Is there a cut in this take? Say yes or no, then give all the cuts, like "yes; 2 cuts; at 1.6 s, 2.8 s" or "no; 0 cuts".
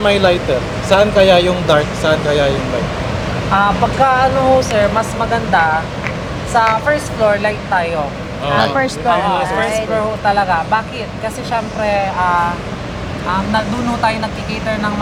no; 0 cuts